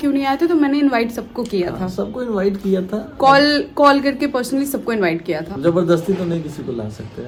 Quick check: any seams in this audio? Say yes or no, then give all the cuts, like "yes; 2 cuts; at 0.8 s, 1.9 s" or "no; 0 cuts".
no; 0 cuts